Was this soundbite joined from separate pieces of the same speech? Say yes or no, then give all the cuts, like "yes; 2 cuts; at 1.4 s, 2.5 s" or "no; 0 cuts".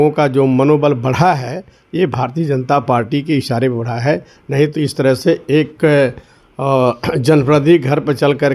no; 0 cuts